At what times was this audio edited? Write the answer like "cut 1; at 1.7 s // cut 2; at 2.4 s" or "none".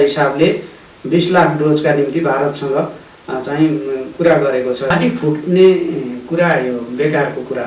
cut 1; at 4.9 s